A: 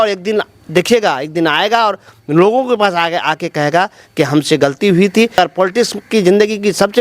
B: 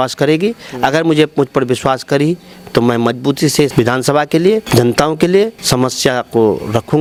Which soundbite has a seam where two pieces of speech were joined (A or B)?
A